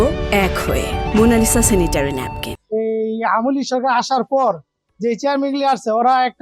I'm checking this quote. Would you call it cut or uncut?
cut